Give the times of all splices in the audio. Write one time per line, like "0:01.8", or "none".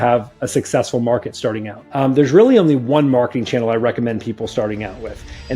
0:01.9